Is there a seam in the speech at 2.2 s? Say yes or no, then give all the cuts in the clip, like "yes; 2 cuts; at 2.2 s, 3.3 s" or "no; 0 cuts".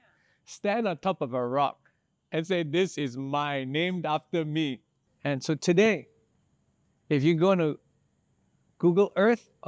no; 1 cut; at 5.1 s